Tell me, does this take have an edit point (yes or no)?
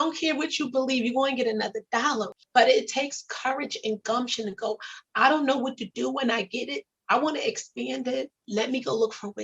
yes